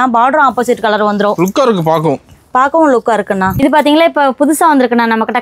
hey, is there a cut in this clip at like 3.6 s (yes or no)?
yes